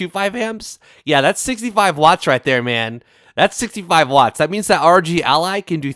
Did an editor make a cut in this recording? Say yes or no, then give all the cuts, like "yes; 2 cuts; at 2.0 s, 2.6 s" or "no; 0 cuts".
no; 0 cuts